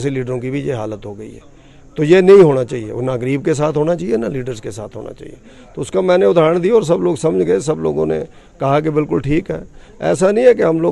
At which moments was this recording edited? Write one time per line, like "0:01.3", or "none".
none